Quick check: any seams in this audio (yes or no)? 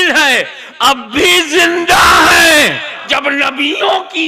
yes